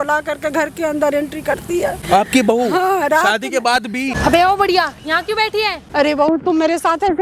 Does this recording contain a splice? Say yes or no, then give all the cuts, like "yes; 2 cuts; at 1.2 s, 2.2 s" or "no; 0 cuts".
yes; 3 cuts; at 2.0 s, 4.2 s, 5.8 s